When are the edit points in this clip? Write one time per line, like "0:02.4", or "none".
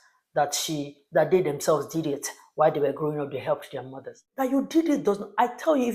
0:04.2